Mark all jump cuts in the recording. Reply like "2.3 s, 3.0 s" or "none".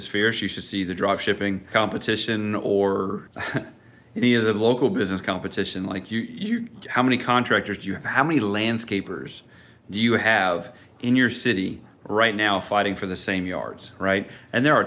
1.7 s, 3.3 s